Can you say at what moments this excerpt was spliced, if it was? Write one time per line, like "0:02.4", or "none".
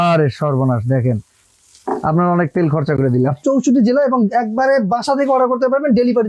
0:03.4

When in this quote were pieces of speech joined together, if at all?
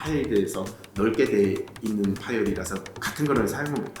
0:03.1

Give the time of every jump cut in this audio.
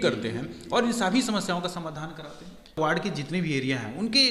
0:02.8

